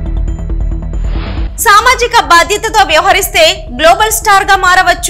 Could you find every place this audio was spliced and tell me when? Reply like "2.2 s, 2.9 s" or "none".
1.5 s